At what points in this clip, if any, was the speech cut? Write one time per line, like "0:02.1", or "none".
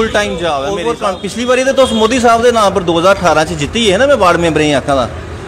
0:00.9